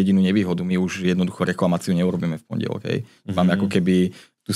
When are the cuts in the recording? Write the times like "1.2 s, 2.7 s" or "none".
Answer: none